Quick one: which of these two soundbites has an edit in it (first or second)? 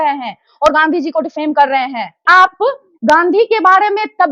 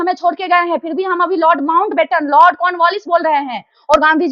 first